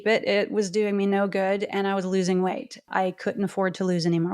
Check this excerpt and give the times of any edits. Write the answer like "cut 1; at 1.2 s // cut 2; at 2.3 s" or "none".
cut 1; at 2.9 s